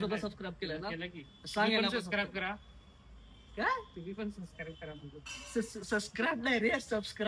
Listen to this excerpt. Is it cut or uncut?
uncut